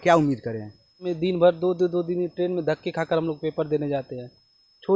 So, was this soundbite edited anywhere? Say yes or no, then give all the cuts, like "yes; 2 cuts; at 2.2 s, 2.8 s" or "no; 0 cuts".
yes; 1 cut; at 1.1 s